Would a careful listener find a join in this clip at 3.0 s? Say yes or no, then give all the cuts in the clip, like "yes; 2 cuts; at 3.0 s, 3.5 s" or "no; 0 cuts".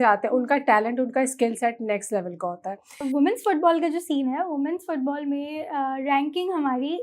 yes; 1 cut; at 3.0 s